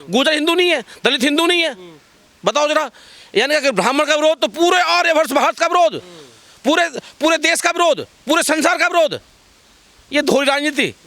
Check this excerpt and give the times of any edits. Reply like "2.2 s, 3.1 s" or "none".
none